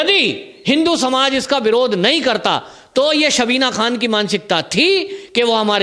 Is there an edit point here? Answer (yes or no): no